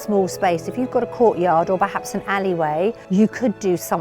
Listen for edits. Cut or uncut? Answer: cut